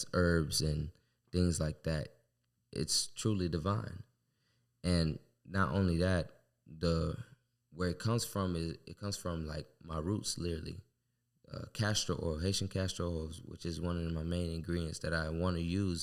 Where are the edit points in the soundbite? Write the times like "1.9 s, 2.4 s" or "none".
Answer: none

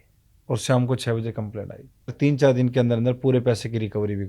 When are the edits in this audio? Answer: 2.1 s

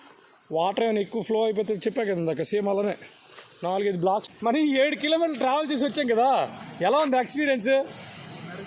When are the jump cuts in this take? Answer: 4.2 s

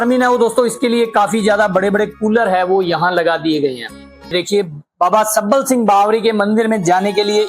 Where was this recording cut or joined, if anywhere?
4.3 s

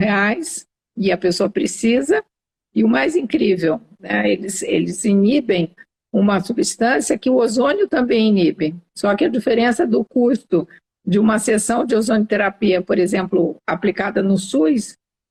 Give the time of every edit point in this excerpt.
none

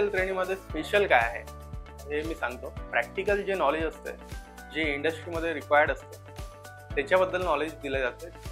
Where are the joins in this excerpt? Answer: 2.9 s

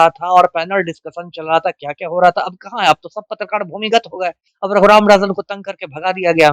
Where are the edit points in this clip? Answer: 4.5 s

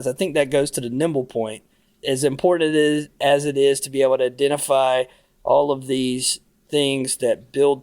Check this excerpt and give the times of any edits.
1.9 s

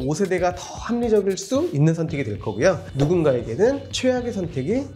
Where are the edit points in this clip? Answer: none

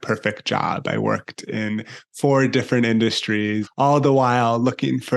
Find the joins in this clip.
3.7 s

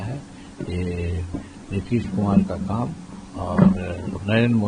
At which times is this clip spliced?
none

